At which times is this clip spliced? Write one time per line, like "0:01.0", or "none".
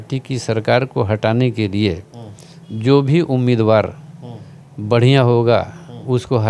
none